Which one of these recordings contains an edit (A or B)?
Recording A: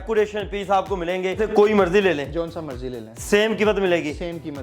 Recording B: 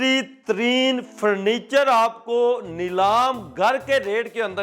A